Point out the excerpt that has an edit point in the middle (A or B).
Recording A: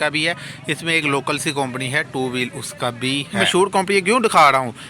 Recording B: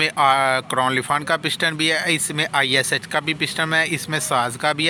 A